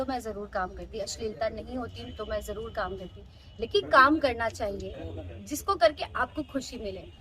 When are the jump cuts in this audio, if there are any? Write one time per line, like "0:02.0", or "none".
0:03.8